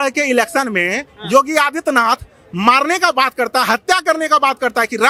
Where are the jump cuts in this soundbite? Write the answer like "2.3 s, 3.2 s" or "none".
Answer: none

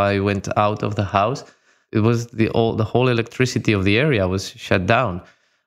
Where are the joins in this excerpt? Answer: 1.9 s

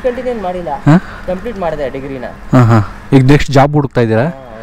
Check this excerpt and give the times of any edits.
none

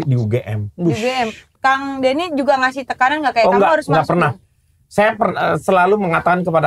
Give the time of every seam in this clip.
1.4 s

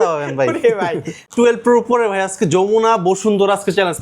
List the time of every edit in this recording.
1.3 s

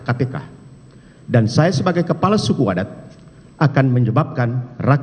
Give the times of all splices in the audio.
none

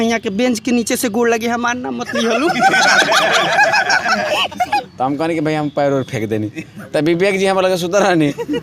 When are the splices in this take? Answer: 4.9 s

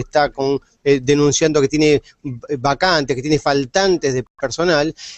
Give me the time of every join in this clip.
1.4 s

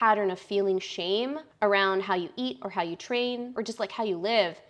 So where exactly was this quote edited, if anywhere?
1.4 s, 3.5 s

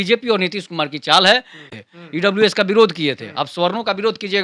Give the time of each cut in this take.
1.7 s

